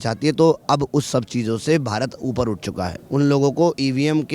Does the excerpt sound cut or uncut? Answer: cut